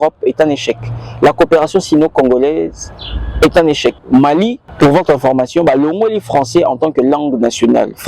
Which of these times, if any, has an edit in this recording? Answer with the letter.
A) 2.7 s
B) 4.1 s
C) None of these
B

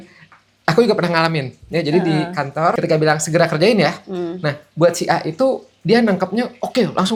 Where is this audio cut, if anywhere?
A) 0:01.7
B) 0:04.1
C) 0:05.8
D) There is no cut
D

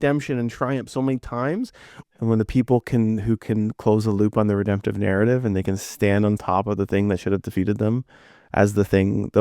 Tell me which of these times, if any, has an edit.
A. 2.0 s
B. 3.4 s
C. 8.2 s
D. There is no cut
A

